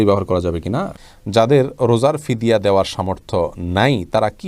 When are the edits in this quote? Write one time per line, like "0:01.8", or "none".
0:01.0